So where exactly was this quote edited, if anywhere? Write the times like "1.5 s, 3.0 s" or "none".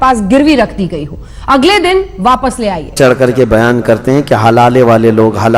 2.9 s